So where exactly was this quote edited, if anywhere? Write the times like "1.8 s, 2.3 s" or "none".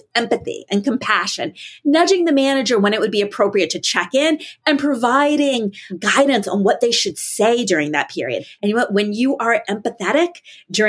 5.9 s, 8.5 s

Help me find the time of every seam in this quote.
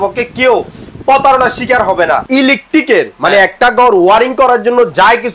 2.2 s

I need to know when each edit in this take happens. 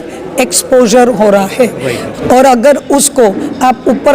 2.1 s

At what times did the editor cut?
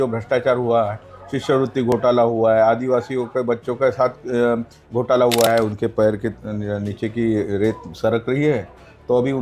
5.5 s

